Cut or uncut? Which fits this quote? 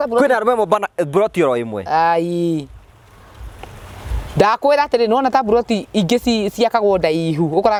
uncut